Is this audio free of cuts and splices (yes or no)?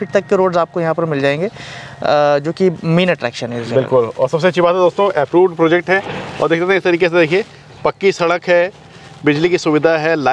yes